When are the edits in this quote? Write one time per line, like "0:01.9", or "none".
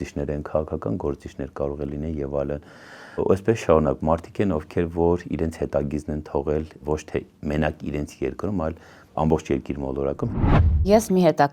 0:10.3

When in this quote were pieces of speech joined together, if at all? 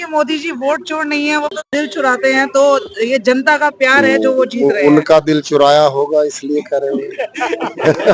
none

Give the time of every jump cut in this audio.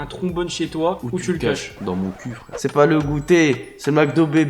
0:01.0
0:02.6

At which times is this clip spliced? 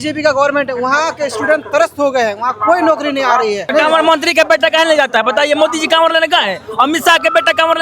0:03.7

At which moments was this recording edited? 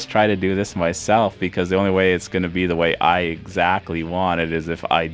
none

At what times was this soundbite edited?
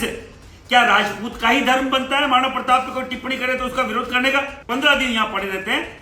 0:04.7

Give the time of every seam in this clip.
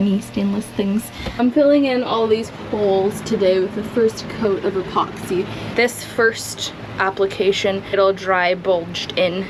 0:01.4
0:05.6
0:08.0

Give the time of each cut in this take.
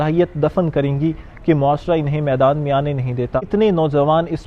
0:03.5

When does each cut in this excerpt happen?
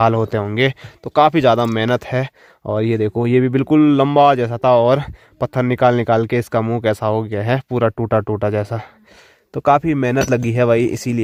none

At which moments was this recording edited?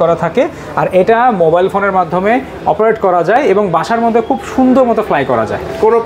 none

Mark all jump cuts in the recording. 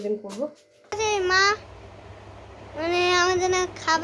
0:01.0

